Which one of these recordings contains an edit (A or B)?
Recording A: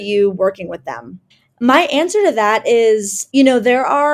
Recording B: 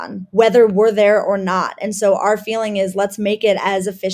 A